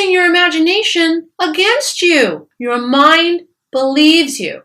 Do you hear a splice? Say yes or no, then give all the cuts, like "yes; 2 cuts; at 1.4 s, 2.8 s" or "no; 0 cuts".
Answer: yes; 1 cut; at 2.5 s